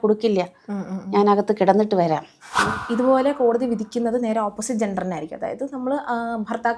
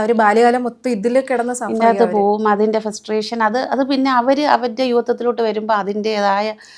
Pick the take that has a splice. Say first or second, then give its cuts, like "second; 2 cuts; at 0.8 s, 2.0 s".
first; 1 cut; at 2.7 s